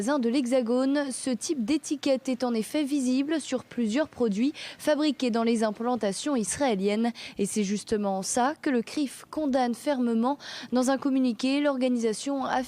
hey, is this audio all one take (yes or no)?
no